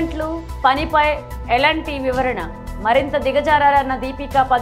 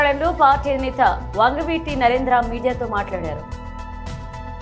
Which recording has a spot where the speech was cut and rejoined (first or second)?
second